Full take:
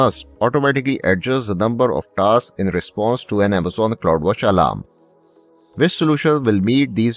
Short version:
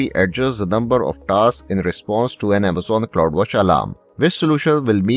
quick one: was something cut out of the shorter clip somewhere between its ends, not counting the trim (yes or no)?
yes